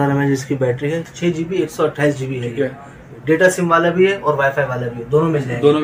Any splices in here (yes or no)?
yes